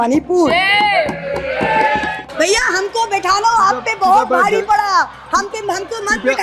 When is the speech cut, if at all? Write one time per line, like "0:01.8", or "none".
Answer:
0:02.1